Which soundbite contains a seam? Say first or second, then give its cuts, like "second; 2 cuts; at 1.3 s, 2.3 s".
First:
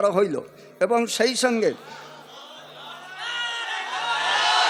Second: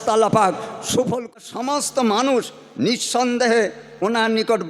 second; 1 cut; at 1.3 s